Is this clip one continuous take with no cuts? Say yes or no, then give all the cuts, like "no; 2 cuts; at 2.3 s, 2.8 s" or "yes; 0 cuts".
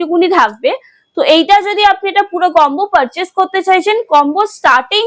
yes; 0 cuts